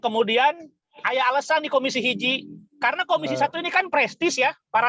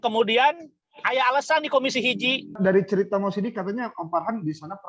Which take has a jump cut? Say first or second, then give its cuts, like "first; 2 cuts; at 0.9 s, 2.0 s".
second; 1 cut; at 2.5 s